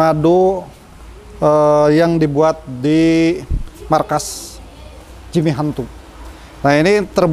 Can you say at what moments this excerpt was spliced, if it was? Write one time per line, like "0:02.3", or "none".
none